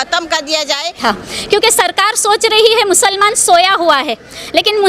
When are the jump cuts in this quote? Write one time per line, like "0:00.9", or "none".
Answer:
0:01.0